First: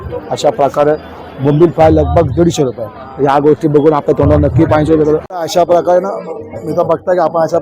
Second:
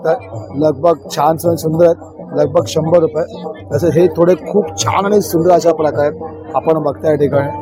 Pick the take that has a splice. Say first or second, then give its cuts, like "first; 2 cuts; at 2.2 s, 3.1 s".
first; 1 cut; at 5.3 s